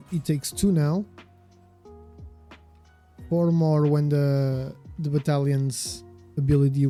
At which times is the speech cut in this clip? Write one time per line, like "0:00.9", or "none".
none